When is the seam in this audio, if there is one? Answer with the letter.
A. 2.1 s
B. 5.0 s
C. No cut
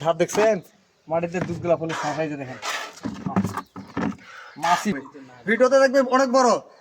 B